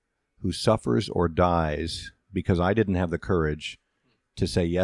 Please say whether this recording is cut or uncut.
uncut